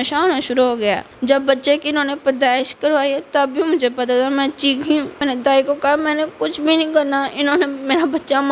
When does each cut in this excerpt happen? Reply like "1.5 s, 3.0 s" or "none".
1.1 s, 5.2 s